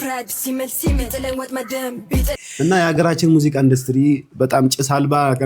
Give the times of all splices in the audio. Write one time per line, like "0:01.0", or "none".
0:02.4